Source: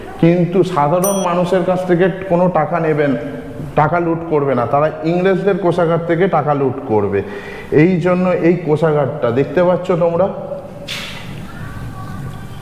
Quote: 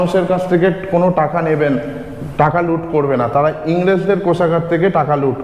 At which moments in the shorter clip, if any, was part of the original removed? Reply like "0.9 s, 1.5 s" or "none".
none